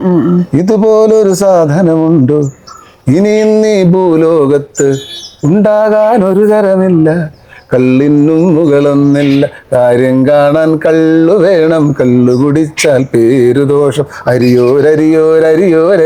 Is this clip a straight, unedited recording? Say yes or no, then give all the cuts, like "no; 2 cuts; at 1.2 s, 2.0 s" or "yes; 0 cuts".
yes; 0 cuts